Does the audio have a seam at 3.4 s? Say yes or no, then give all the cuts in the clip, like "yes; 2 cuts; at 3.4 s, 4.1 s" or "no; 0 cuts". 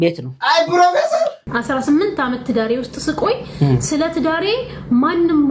no; 1 cut; at 1.4 s